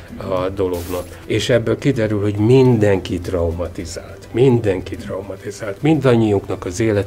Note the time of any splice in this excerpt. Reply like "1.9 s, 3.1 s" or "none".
1.1 s